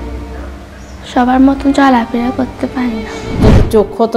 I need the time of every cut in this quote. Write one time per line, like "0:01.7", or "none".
0:03.2